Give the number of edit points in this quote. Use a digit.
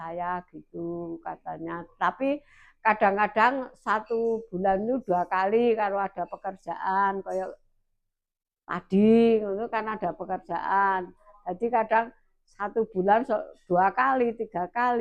0